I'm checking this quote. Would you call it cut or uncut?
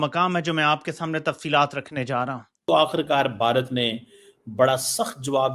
cut